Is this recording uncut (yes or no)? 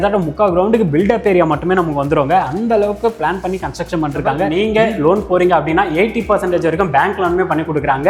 no